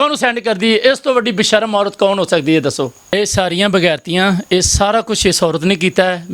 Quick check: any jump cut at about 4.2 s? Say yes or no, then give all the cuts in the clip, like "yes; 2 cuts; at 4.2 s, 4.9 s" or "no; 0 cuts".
no; 1 cut; at 3.0 s